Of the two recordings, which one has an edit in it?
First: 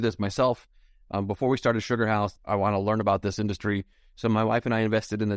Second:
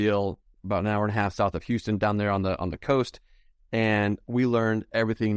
first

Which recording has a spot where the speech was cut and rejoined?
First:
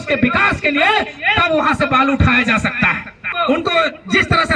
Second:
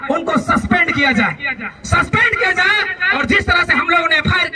first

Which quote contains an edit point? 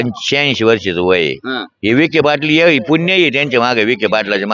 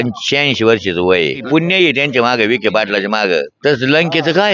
second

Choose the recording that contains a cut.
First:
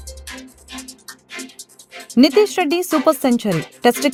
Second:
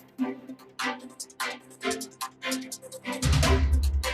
second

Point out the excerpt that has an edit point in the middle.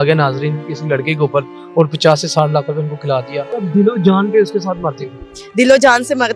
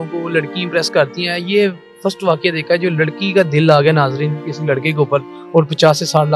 first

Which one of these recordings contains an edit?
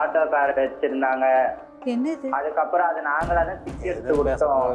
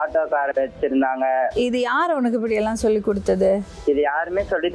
second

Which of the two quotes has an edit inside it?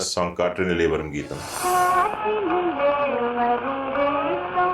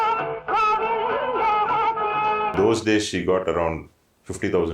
second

